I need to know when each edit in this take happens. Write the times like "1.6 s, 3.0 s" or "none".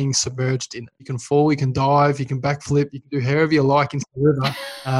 1.1 s